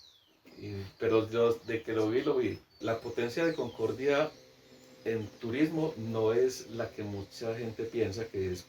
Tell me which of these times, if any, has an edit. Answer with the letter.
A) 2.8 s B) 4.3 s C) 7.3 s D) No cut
A